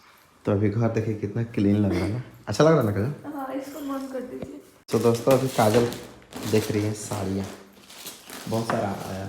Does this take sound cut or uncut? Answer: cut